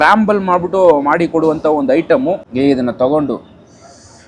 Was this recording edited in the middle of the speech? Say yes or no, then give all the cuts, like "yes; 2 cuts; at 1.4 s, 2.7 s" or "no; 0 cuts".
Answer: yes; 1 cut; at 2.5 s